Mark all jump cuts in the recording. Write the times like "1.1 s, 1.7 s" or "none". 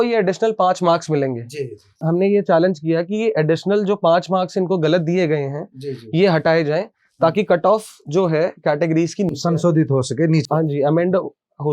2.0 s